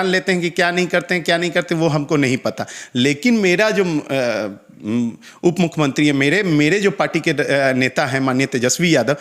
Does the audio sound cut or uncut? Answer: uncut